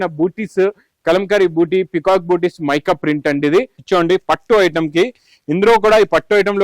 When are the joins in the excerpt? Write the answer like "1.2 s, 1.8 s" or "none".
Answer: 3.8 s